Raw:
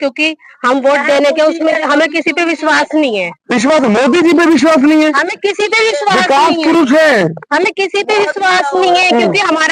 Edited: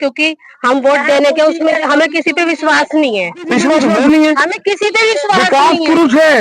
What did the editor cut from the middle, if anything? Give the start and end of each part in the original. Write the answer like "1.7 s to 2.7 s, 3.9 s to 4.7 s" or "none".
3.9 s to 4.7 s